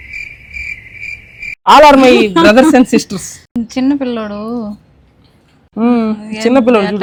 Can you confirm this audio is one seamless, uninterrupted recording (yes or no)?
yes